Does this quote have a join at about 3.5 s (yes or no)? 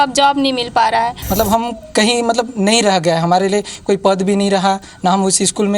no